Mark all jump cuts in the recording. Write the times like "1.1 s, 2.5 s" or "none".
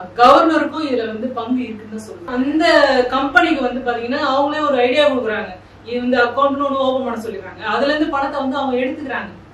2.3 s